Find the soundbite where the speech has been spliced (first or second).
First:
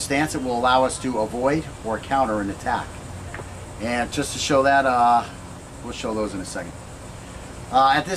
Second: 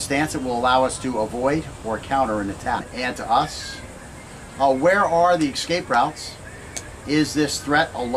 first